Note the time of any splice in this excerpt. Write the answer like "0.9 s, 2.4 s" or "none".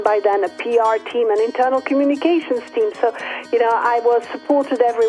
none